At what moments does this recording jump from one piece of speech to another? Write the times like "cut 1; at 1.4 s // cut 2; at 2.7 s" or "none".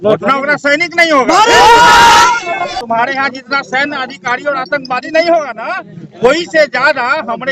cut 1; at 2.8 s